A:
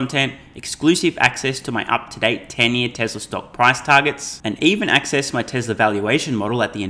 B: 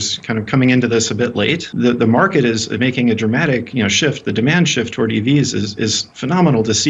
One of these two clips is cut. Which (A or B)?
B